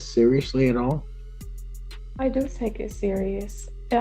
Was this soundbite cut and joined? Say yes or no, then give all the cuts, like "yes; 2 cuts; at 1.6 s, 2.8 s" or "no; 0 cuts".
no; 0 cuts